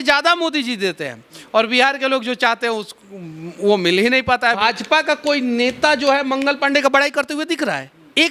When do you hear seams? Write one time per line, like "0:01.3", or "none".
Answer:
0:04.6